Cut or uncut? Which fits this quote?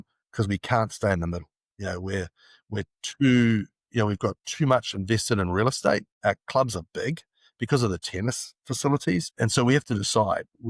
cut